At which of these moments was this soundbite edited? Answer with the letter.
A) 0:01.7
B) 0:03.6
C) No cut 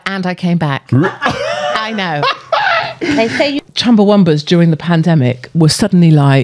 B